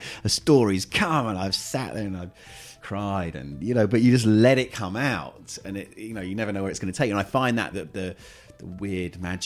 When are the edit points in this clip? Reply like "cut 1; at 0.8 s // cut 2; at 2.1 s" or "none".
cut 1; at 2.8 s // cut 2; at 7.7 s